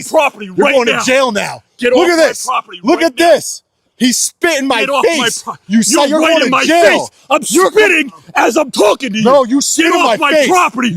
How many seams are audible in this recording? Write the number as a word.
zero